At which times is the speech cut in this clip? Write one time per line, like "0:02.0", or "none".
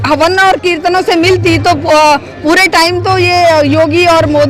none